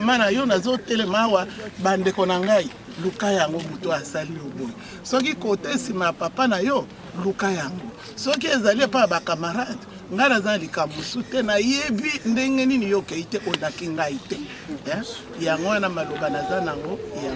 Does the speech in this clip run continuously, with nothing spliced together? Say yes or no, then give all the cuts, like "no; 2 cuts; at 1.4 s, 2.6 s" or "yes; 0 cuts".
yes; 0 cuts